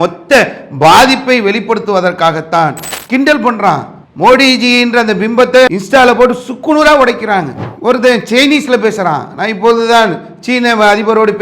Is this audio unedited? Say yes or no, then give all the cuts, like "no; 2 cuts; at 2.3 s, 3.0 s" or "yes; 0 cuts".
no; 1 cut; at 2.9 s